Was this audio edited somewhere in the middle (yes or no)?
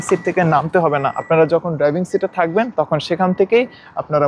no